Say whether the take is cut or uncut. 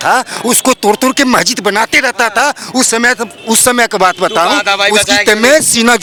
uncut